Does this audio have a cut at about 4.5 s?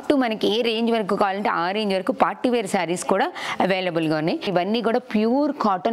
yes; 1 cut; at 4.5 s

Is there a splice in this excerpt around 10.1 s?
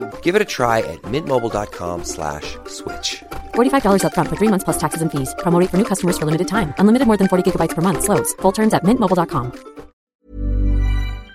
yes; 1 cut; at 10.1 s

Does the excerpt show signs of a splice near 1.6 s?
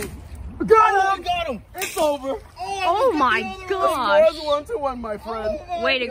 no; 0 cuts

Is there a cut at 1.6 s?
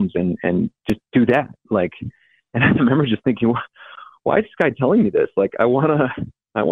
no; 0 cuts

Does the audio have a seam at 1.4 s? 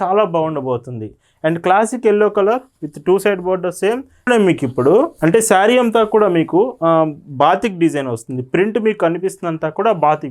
no; 1 cut; at 4.3 s

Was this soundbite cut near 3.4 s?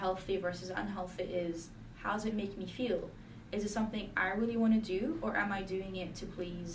no; 0 cuts

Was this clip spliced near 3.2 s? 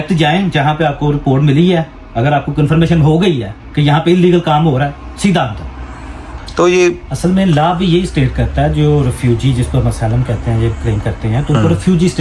no; 1 cut; at 6.3 s

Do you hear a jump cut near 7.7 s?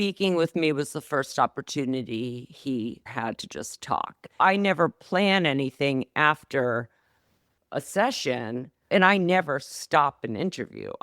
no; 2 cuts; at 3.1 s, 4.4 s

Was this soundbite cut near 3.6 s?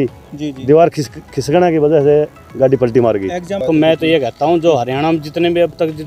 yes; 1 cut; at 3.6 s

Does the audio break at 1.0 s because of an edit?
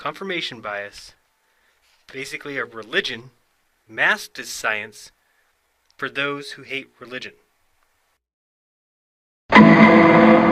no; 0 cuts

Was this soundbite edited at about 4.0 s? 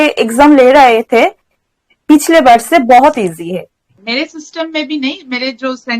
yes; 1 cut; at 4.0 s

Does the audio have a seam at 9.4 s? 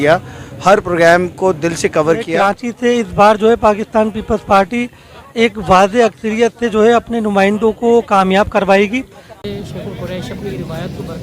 yes; 2 cuts; at 2.3 s, 9.4 s

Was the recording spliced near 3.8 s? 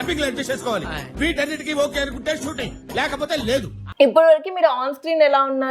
yes; 1 cut; at 3.8 s

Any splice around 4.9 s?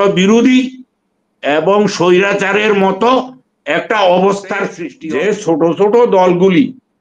yes; 1 cut; at 4.9 s

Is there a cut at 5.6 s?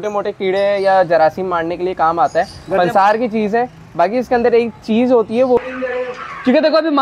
yes; 1 cut; at 5.6 s

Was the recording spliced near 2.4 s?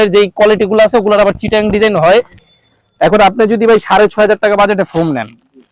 yes; 1 cut; at 2.4 s

